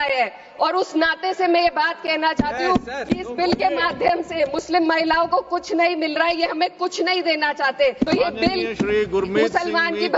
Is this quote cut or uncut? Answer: cut